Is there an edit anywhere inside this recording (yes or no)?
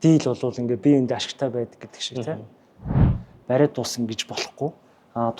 yes